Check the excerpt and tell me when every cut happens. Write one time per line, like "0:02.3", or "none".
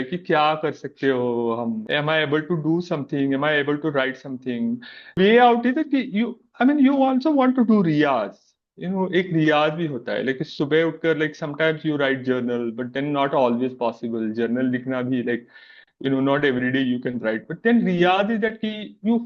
0:01.8
0:05.1